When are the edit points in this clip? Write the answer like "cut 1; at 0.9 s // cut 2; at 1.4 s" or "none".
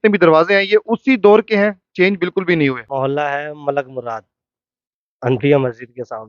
cut 1; at 2.8 s